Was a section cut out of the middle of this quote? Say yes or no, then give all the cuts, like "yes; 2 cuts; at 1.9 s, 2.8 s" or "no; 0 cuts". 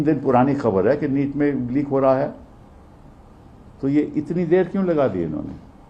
no; 0 cuts